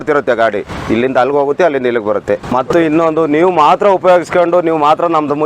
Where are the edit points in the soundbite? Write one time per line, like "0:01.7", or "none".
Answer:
0:02.5